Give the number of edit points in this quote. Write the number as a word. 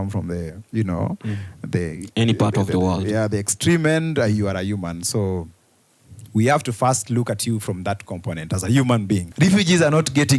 one